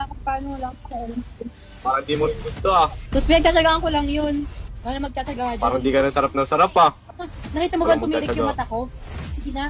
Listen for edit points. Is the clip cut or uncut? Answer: cut